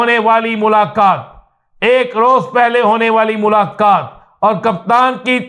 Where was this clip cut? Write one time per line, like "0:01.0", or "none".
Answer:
none